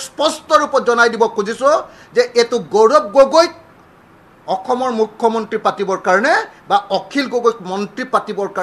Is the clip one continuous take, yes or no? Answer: yes